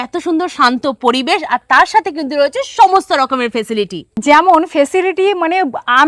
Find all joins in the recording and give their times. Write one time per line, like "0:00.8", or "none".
0:04.1